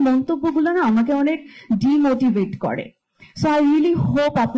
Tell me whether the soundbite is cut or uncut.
uncut